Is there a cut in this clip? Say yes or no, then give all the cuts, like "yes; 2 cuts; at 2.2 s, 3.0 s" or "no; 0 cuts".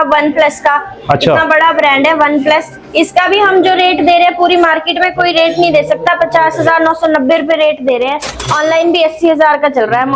no; 0 cuts